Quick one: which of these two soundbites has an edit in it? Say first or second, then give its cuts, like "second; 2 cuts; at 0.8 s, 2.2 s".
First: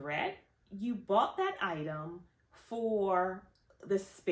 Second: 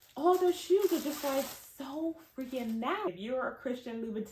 second; 1 cut; at 3.1 s